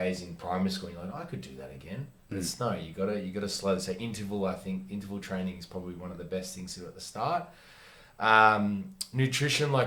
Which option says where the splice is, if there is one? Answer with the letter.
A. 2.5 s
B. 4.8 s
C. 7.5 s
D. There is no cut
D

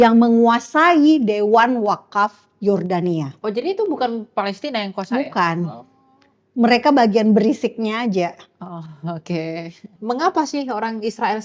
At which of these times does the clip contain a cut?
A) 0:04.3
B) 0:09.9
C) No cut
B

